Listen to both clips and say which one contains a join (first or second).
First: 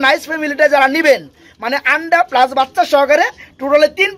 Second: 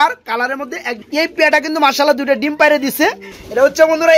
second